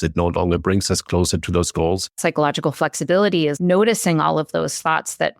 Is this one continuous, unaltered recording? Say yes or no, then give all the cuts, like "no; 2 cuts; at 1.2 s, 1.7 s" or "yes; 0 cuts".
no; 2 cuts; at 2.1 s, 3.6 s